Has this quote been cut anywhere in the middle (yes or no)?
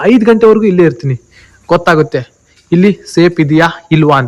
no